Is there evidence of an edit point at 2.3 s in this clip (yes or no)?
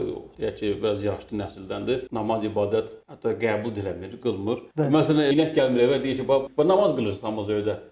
no